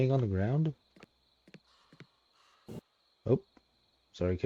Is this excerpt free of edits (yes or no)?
yes